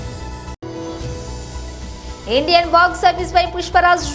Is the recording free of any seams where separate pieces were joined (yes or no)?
no